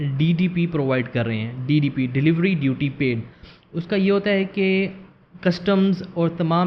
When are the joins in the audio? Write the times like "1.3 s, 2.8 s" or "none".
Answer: none